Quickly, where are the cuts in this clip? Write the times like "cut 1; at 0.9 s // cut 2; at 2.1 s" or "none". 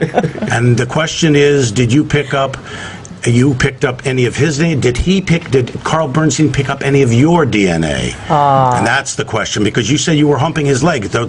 cut 1; at 1.7 s